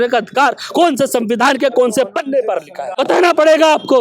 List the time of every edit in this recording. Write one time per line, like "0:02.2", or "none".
0:02.9